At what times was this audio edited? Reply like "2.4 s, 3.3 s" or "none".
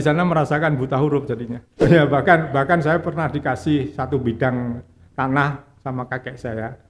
1.8 s